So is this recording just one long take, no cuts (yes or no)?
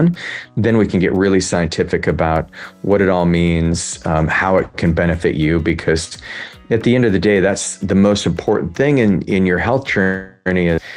yes